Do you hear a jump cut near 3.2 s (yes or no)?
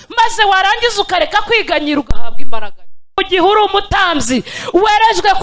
yes